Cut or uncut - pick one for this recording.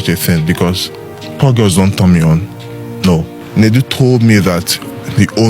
cut